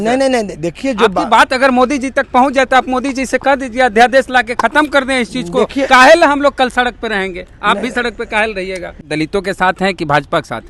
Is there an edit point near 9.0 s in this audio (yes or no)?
yes